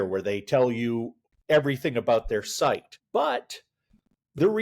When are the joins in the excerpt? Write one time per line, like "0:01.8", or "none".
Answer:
0:02.9